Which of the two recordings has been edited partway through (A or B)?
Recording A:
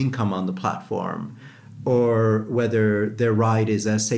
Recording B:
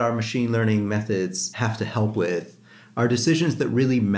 B